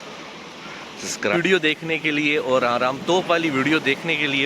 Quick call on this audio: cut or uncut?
cut